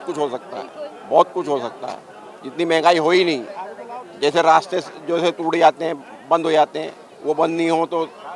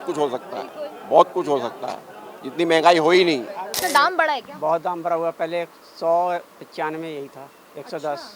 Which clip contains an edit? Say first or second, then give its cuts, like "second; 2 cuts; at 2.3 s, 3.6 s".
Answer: second; 1 cut; at 3.7 s